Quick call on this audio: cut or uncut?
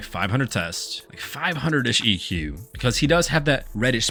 uncut